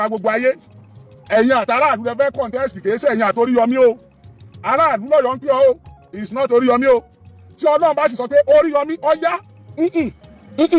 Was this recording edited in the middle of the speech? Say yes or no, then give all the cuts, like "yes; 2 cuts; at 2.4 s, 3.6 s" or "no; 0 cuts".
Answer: no; 0 cuts